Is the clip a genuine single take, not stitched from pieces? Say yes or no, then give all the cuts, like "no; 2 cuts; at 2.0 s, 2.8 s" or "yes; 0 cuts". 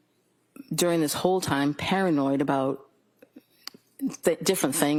yes; 0 cuts